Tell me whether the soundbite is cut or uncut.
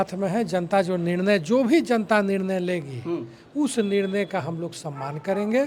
uncut